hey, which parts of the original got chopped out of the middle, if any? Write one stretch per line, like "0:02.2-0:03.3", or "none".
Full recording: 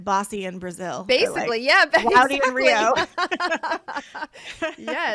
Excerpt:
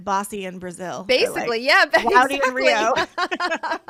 none